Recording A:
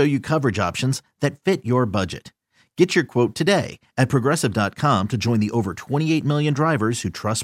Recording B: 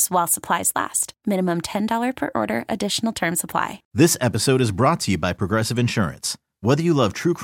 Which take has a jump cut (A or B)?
B